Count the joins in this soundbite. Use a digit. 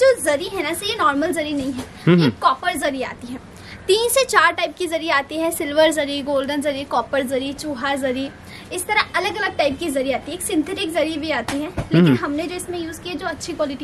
0